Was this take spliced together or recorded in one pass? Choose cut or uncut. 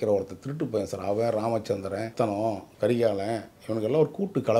cut